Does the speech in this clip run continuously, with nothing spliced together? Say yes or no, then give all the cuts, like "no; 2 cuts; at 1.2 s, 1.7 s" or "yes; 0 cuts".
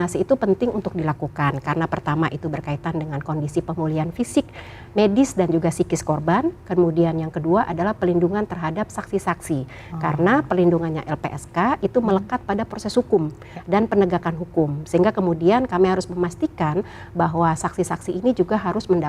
yes; 0 cuts